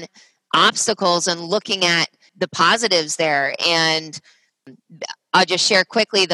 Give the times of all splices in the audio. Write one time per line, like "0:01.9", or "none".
0:02.3
0:04.7